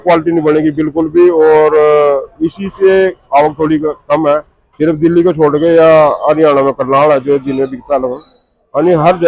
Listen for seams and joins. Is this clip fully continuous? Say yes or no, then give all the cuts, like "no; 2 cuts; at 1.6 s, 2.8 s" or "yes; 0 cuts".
no; 1 cut; at 4.6 s